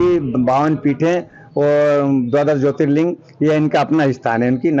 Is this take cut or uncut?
uncut